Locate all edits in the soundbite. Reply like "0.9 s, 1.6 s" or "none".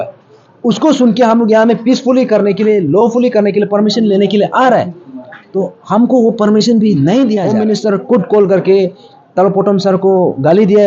7.5 s